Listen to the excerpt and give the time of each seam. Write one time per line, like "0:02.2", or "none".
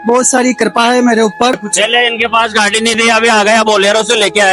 0:01.7